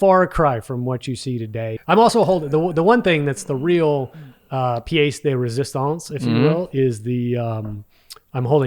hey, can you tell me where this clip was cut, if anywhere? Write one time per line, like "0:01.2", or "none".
0:01.8